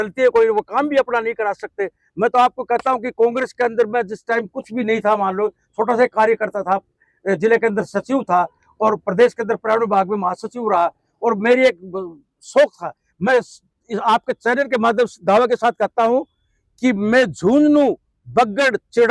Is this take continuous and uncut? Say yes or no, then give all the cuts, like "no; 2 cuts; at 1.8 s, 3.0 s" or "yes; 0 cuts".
yes; 0 cuts